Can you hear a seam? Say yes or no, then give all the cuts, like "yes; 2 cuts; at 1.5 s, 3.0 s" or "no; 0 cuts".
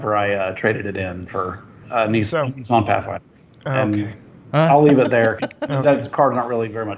no; 0 cuts